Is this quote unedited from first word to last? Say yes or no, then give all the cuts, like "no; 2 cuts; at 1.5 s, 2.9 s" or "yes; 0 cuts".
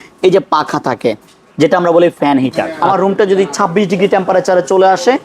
no; 1 cut; at 2.7 s